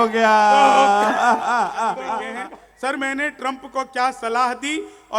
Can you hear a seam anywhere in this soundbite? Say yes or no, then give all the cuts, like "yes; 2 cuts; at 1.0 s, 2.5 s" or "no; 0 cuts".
yes; 1 cut; at 2.3 s